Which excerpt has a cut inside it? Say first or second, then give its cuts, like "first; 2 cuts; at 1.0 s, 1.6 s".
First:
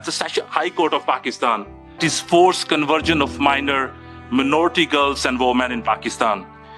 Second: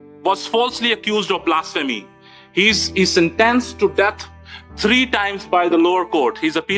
first; 1 cut; at 2.0 s